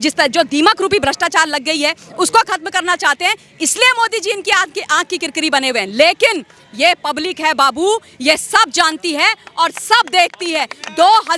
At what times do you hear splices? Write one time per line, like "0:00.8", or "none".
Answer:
none